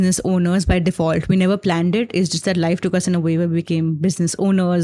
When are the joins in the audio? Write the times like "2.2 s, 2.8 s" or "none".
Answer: none